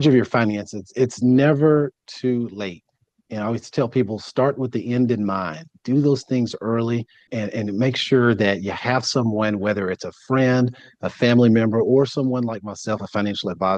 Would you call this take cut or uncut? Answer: uncut